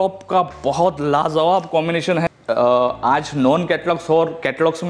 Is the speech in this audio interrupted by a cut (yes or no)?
yes